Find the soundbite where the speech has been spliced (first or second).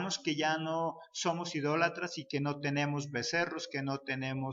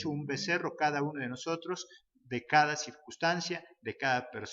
first